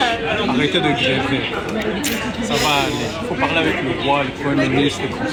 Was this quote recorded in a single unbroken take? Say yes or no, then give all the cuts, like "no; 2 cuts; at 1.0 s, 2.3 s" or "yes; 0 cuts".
yes; 0 cuts